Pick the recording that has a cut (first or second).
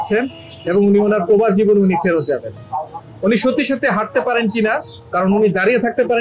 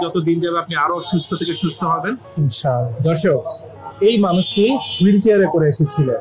second